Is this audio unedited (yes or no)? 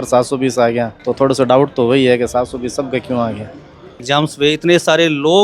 no